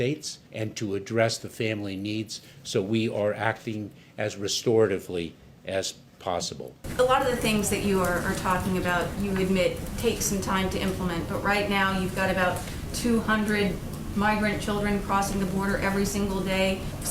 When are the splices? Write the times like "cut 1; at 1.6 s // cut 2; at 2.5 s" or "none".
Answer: cut 1; at 6.7 s